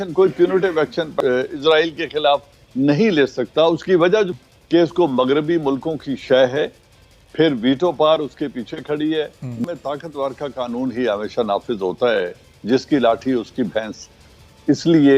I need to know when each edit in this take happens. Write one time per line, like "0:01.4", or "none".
0:01.1
0:04.3
0:09.6